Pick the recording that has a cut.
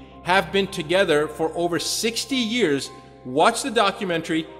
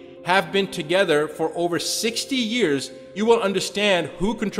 second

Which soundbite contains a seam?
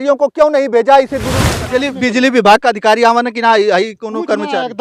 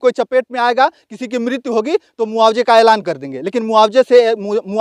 first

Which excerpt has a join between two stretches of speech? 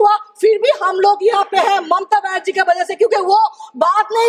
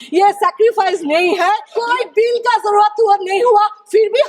second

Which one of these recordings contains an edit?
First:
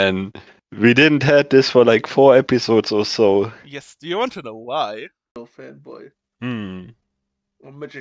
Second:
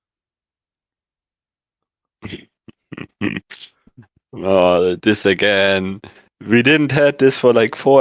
first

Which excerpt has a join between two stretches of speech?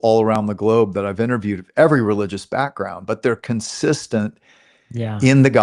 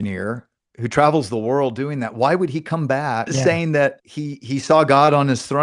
second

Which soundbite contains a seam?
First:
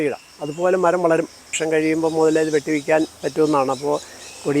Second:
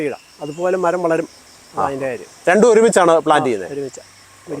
first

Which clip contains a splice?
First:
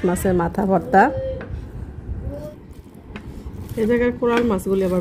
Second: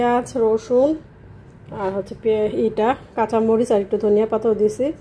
first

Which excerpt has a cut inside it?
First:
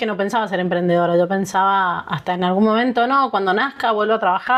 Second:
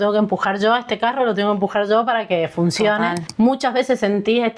second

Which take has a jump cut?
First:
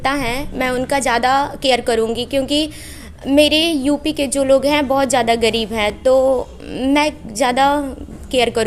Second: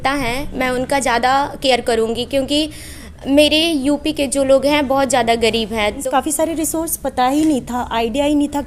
second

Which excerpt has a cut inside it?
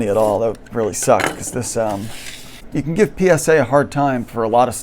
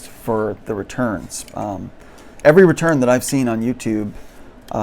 first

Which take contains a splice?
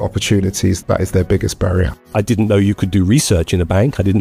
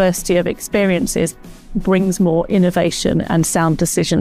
first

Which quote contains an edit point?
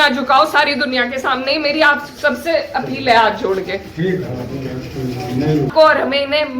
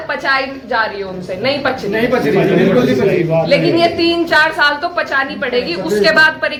first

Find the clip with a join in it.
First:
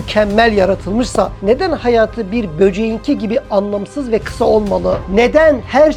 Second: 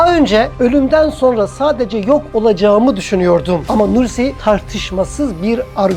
first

